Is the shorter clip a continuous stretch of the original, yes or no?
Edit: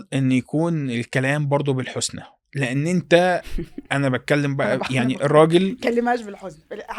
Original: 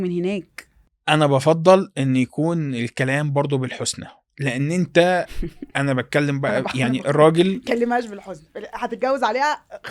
yes